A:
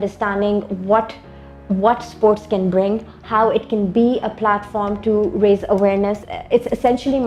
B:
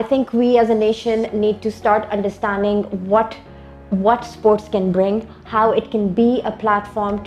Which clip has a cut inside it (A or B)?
A